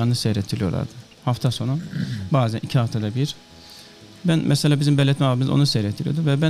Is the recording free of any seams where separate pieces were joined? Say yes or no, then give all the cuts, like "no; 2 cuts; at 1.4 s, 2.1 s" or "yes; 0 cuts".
yes; 0 cuts